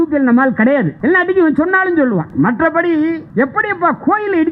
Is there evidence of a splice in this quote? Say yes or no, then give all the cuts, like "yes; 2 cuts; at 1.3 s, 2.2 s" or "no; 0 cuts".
yes; 3 cuts; at 0.9 s, 2.3 s, 3.2 s